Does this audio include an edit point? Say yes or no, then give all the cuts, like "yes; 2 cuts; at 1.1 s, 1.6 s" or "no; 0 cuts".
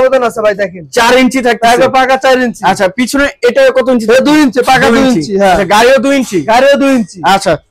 no; 0 cuts